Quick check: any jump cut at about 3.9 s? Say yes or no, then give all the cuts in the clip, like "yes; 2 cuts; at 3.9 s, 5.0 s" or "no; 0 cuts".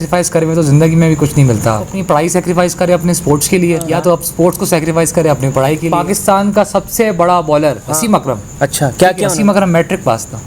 yes; 5 cuts; at 1.9 s, 3.9 s, 5.9 s, 7.9 s, 9.3 s